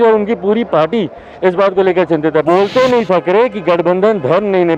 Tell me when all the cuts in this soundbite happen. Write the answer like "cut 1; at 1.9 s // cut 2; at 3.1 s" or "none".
cut 1; at 2.4 s